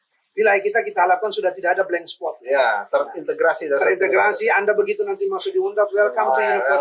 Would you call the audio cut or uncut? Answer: uncut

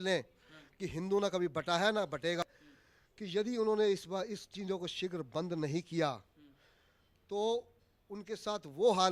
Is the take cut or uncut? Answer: cut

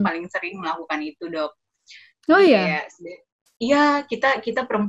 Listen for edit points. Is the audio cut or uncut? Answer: uncut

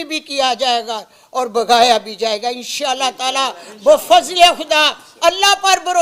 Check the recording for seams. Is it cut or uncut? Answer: uncut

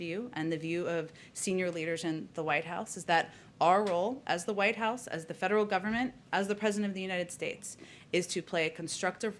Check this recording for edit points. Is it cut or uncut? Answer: uncut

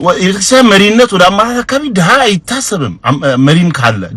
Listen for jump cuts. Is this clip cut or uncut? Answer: uncut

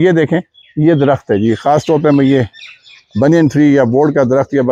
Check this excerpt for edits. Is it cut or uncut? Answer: uncut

